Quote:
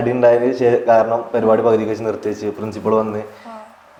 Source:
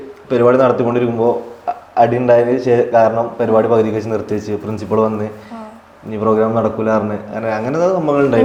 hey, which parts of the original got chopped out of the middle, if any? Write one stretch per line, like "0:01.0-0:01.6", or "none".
none